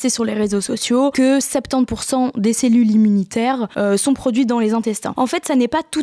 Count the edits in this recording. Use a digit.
3